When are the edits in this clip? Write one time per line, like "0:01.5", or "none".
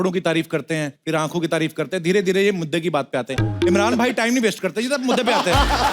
0:00.9